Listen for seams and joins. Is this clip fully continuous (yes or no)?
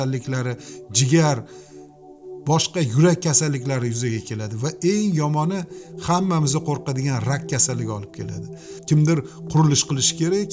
no